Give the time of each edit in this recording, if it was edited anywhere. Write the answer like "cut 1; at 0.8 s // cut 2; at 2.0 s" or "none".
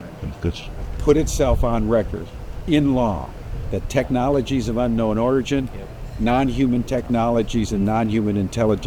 none